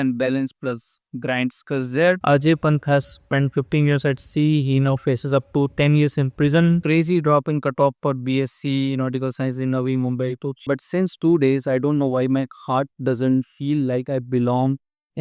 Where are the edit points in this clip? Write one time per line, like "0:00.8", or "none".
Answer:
0:02.2
0:06.8
0:10.7